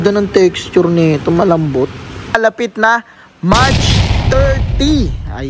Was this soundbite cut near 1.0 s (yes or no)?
no